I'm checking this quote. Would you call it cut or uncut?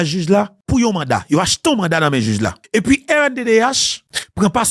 uncut